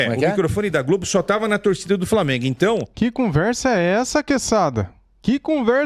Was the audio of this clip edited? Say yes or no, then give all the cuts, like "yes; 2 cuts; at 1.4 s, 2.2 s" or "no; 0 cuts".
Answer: no; 0 cuts